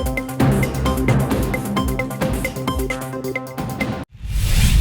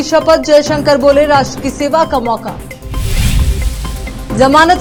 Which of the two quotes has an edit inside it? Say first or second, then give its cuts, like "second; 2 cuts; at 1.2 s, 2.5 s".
first; 1 cut; at 3.9 s